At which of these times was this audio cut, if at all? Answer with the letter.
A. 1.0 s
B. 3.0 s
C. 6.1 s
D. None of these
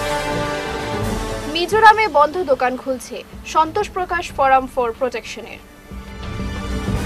A